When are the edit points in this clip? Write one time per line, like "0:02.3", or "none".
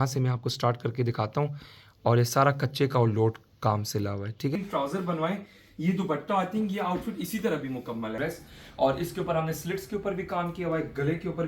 0:04.6
0:08.2